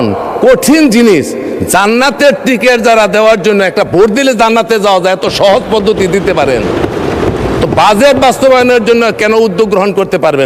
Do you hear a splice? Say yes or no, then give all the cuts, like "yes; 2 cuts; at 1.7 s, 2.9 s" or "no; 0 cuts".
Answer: no; 0 cuts